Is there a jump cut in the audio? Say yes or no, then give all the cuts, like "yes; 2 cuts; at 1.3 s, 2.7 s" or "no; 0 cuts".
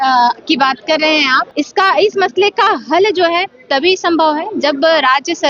yes; 1 cut; at 1.4 s